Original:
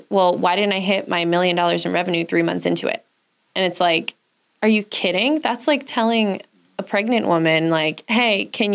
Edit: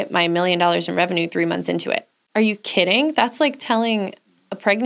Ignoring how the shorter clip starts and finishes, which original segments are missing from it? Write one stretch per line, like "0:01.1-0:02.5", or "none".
0:03.1-0:04.4